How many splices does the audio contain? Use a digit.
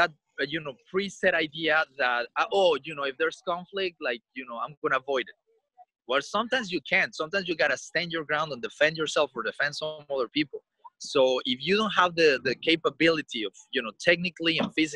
0